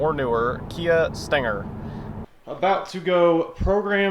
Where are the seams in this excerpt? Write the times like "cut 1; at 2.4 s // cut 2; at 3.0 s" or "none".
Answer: cut 1; at 2.1 s